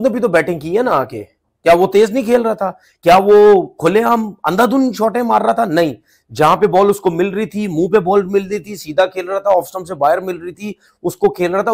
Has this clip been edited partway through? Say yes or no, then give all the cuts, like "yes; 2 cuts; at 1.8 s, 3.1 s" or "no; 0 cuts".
no; 0 cuts